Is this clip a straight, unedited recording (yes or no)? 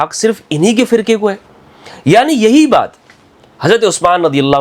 yes